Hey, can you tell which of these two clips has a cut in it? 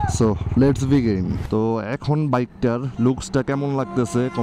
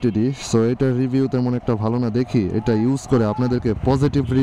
first; 1 cut; at 1.4 s

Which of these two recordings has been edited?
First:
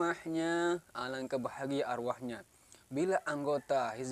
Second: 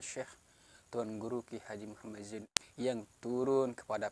second; 1 cut; at 2.6 s

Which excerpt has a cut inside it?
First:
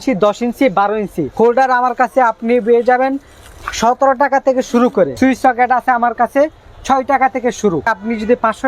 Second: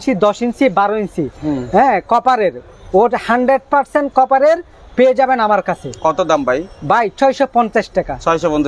first; 3 cuts; at 1.2 s, 5.1 s, 7.9 s

